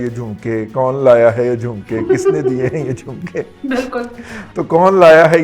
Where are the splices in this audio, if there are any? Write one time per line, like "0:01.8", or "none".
none